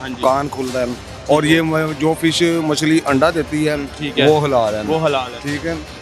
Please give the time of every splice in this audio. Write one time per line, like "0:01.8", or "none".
none